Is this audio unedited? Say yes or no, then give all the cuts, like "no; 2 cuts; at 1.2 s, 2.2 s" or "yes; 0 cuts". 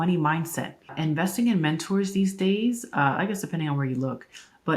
no; 1 cut; at 0.9 s